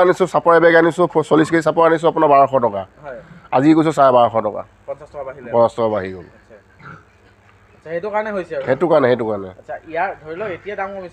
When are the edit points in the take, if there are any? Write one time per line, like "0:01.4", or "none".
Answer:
none